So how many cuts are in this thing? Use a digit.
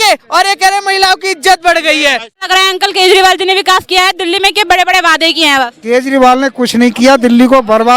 1